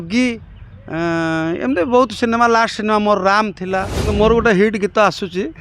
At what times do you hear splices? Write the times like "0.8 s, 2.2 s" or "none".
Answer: 4.1 s